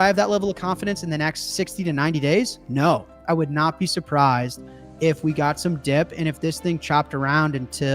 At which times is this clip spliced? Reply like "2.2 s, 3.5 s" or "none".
3.1 s